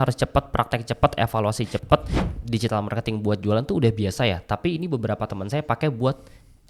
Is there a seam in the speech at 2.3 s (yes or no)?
yes